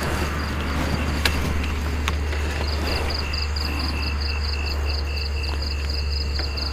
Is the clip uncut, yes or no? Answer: yes